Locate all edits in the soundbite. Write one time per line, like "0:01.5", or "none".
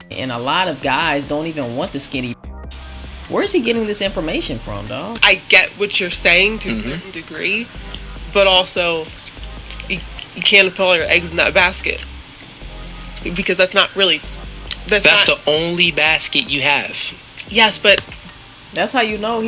0:05.2